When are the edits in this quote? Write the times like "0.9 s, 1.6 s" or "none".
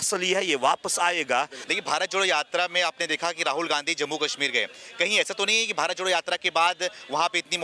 1.6 s